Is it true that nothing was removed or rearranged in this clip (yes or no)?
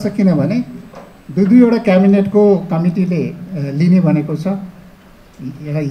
yes